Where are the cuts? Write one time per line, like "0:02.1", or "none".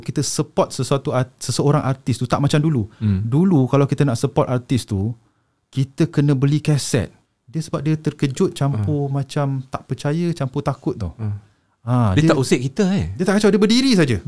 0:07.2